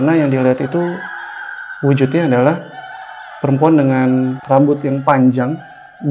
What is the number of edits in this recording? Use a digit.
1